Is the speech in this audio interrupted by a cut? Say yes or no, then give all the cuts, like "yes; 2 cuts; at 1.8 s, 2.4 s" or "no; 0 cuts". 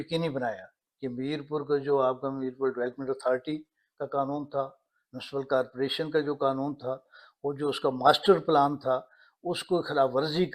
no; 0 cuts